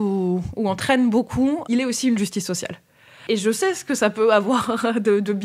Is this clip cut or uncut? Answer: cut